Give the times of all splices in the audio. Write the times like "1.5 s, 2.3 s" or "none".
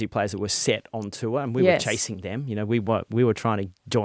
none